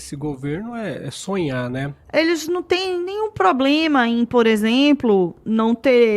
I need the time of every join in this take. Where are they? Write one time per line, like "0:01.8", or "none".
0:01.9